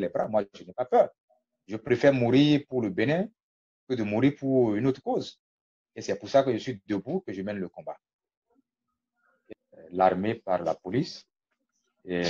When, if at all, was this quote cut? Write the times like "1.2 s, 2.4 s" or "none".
9.4 s